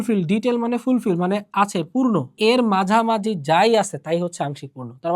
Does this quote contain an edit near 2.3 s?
yes; 1 cut; at 2.3 s

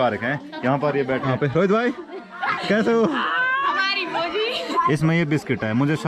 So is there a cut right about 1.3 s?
yes; 2 cuts; at 1.3 s, 4.6 s

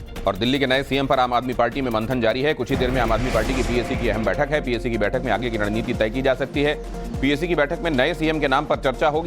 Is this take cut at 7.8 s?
yes; 1 cut; at 7.8 s

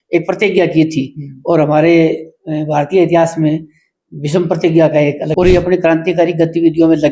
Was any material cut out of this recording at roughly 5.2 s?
yes; 1 cut; at 5.2 s

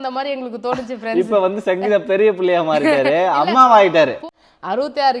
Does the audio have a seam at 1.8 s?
no; 1 cut; at 4.2 s

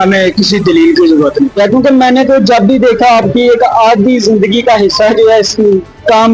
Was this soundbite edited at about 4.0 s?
no; 1 cut; at 1.6 s

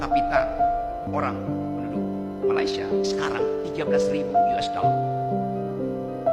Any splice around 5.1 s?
no; 1 cut; at 1.1 s

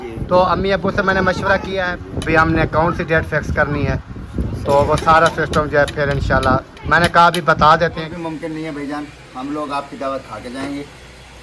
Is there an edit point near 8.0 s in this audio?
yes; 2 cuts; at 1.9 s, 8.0 s

